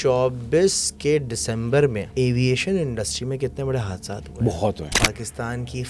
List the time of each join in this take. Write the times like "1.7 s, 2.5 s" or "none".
2.1 s, 4.9 s